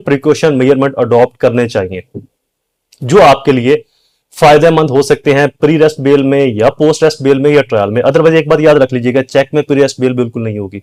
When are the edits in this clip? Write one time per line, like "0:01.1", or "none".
none